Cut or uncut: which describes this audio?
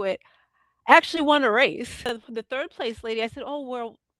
cut